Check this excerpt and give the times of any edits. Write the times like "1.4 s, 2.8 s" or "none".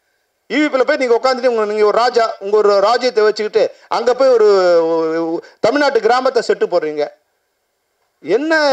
none